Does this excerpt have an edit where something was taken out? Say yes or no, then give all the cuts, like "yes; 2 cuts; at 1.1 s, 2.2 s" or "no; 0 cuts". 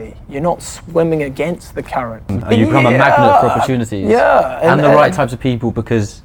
no; 0 cuts